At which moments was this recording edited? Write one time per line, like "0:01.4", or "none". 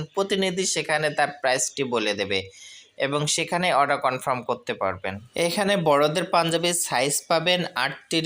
0:05.2